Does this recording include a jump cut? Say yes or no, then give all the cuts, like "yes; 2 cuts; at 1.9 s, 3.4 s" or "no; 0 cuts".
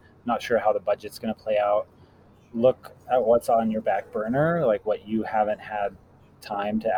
no; 0 cuts